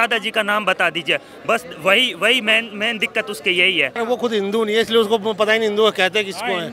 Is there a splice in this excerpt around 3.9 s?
yes; 1 cut; at 3.9 s

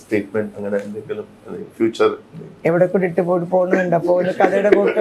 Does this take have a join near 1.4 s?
no; 0 cuts

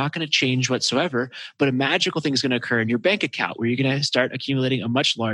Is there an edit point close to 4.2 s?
no; 0 cuts

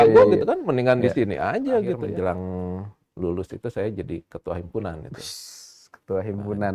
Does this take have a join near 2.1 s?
yes; 1 cut; at 2.1 s

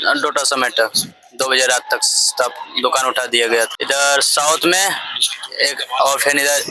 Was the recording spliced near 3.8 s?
yes; 1 cut; at 3.8 s

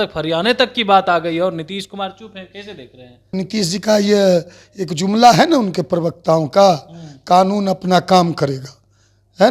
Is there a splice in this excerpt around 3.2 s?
yes; 1 cut; at 3.2 s

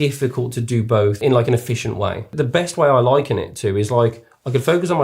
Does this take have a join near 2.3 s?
yes; 2 cuts; at 1.2 s, 2.3 s

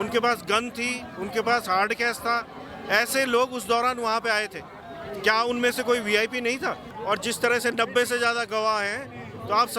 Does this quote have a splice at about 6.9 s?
yes; 1 cut; at 6.9 s

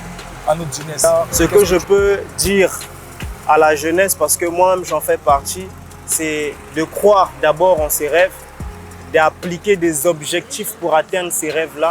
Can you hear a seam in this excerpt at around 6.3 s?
no; 1 cut; at 1.0 s

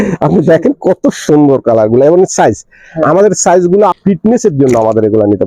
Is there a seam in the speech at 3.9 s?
yes; 1 cut; at 3.9 s

